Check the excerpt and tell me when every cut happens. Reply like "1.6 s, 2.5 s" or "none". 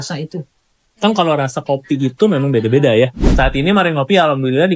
3.2 s

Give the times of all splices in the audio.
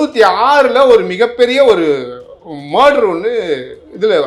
none

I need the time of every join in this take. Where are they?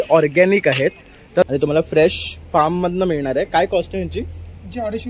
1.5 s

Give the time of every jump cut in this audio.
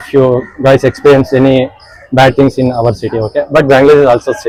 none

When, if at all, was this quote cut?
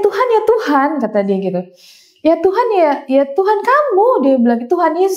none

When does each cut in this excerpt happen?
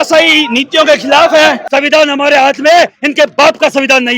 1.7 s

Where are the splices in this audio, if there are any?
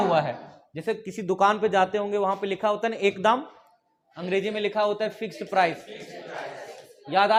none

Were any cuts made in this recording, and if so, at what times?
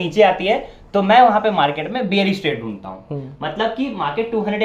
none

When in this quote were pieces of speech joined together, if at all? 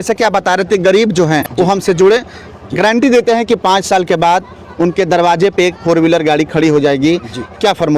1.5 s

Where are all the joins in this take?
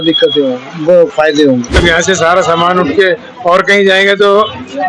1.8 s

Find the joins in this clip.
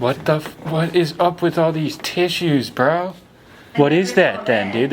3.7 s

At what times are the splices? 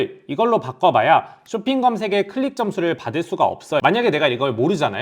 3.8 s

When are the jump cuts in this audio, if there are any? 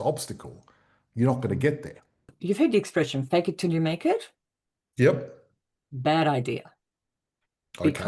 2.3 s

